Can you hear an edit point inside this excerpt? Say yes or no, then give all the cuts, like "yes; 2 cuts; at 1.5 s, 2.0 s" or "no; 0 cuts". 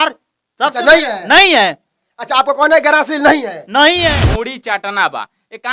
yes; 1 cut; at 4.2 s